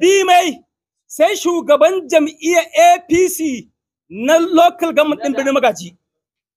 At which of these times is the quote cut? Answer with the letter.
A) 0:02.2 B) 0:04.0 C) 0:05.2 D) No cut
D